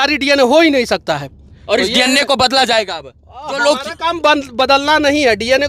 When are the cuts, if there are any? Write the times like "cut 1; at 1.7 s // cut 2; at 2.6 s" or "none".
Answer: none